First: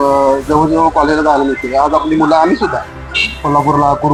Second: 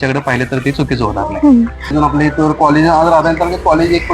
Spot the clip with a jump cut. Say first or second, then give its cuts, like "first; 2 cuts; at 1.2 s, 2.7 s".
second; 1 cut; at 1.9 s